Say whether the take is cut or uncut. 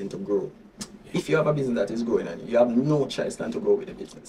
cut